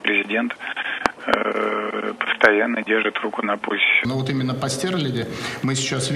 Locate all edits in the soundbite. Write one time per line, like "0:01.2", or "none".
0:04.1